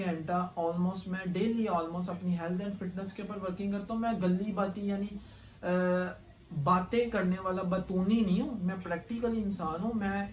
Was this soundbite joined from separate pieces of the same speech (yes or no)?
no